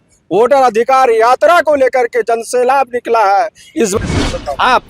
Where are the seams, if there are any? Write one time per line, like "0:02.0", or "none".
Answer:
0:04.0

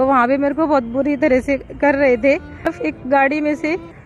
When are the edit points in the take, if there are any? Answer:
0:02.6

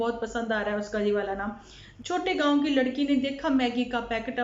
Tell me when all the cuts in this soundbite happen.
0:01.9

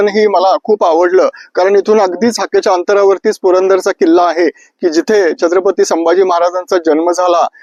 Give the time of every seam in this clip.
none

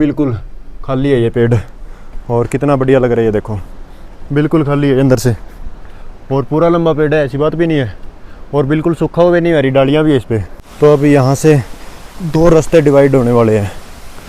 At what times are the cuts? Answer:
0:10.4

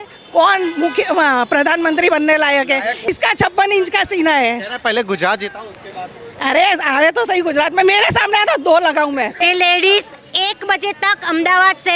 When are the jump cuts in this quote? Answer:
0:03.1
0:09.3

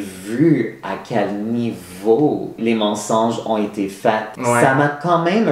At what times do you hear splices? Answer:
0:02.5

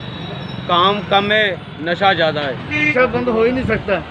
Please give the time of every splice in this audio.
0:02.9

